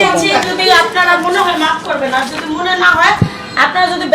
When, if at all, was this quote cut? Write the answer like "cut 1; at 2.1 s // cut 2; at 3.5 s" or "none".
none